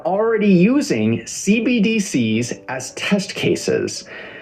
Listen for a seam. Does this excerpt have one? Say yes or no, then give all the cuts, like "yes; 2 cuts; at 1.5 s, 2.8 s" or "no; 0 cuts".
no; 0 cuts